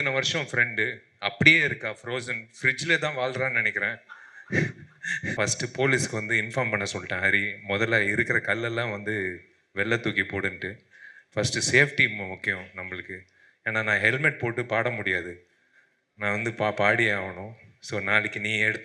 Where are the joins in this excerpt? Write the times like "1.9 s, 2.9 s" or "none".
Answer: 5.3 s